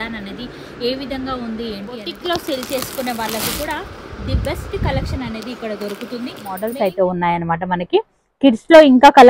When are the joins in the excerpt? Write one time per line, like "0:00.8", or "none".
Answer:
0:02.1
0:06.7